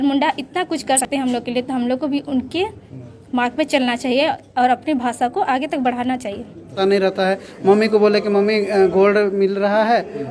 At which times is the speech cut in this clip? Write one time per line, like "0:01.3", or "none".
0:01.0
0:06.8